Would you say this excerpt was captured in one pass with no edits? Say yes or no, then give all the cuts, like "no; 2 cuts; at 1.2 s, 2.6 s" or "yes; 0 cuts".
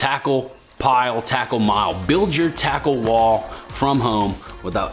yes; 0 cuts